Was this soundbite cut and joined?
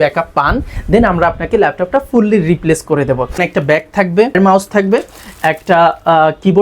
yes; 2 cuts; at 3.4 s, 4.3 s

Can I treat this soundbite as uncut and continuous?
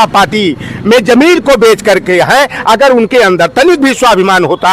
yes; 0 cuts

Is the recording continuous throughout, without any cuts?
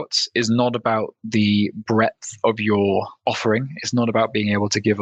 no; 1 cut; at 3.1 s

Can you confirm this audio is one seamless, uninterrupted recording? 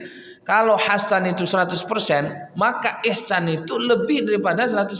yes; 0 cuts

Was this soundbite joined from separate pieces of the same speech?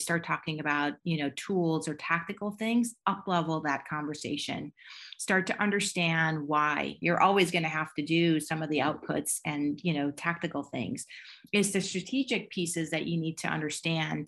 yes; 1 cut; at 7.0 s

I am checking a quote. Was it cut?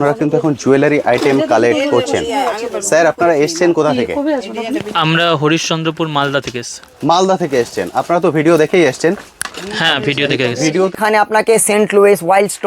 yes; 1 cut; at 10.9 s

